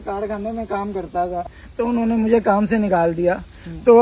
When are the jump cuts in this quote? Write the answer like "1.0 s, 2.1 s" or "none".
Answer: 1.6 s